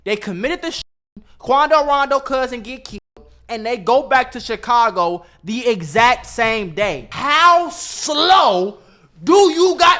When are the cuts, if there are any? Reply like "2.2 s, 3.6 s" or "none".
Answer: 7.1 s

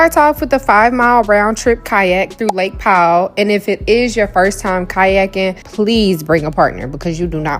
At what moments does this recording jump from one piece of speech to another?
none

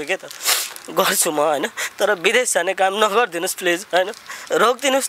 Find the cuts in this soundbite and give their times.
none

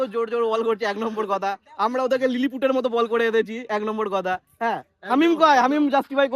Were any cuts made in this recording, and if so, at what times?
none

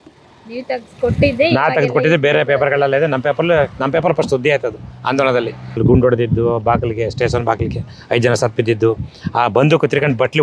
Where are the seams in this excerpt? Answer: 5.8 s

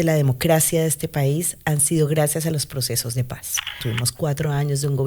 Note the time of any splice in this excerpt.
3.8 s

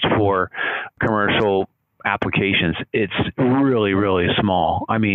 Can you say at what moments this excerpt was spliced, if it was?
1.0 s

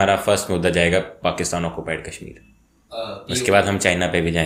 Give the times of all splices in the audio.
none

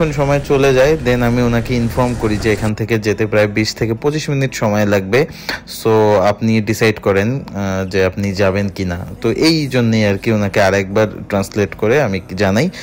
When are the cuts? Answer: none

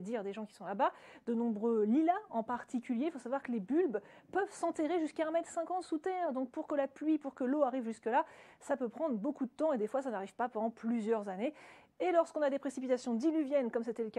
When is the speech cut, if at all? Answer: none

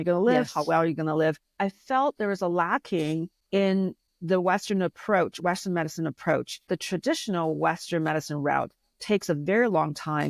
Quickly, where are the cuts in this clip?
1.5 s, 3.4 s, 4.1 s, 6.7 s

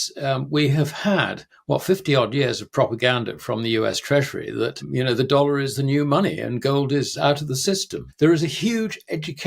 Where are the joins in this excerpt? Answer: 4.8 s, 8.0 s

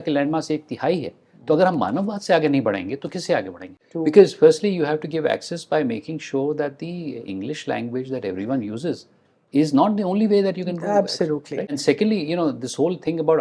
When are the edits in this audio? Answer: 3.7 s, 11.6 s

